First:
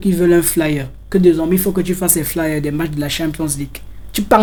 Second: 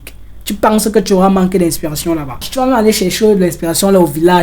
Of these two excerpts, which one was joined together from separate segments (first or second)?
second